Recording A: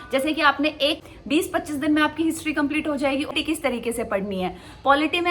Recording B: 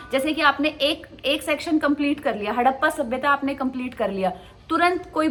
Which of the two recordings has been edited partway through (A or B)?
A